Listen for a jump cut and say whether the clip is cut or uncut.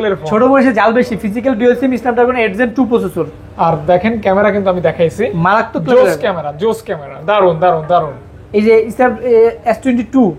uncut